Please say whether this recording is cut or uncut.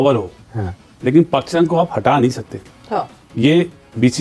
uncut